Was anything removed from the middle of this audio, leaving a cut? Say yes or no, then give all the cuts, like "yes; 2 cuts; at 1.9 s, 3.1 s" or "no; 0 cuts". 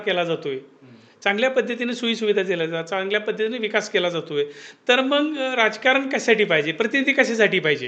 no; 0 cuts